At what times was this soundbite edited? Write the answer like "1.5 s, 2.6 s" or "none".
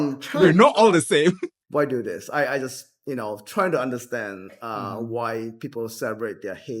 1.5 s